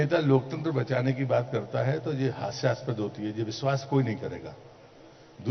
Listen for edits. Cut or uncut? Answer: uncut